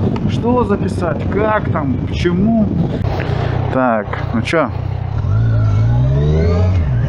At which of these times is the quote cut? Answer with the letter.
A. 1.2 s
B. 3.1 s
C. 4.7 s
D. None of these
D